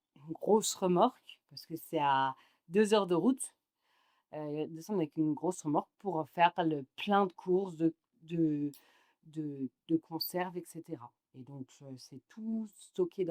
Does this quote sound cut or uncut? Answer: uncut